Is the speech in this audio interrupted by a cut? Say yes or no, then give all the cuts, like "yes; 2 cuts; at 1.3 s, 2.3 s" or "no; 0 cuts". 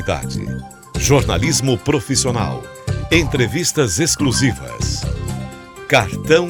no; 0 cuts